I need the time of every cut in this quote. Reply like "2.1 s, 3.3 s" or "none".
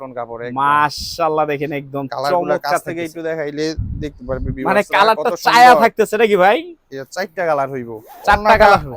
none